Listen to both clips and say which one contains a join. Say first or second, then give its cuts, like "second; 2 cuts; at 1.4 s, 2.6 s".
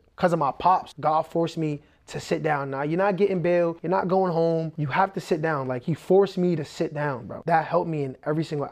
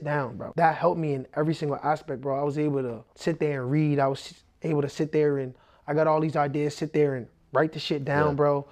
first; 3 cuts; at 0.9 s, 3.8 s, 4.8 s